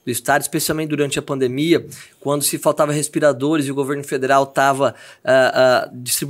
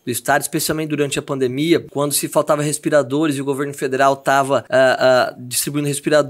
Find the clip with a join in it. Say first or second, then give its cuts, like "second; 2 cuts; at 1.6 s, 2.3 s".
second; 2 cuts; at 1.9 s, 4.7 s